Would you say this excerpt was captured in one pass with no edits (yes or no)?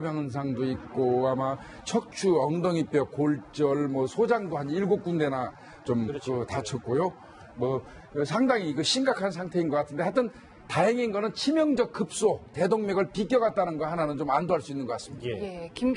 no